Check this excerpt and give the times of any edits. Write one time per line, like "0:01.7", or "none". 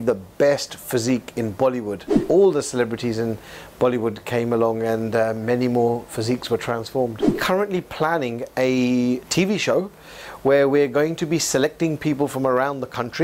0:02.2
0:07.4